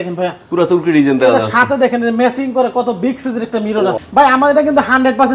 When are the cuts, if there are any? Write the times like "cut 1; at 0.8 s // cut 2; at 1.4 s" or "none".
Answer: cut 1; at 4.0 s